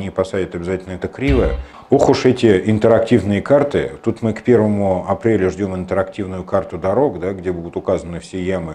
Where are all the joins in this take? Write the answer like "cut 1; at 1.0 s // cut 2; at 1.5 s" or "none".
cut 1; at 1.7 s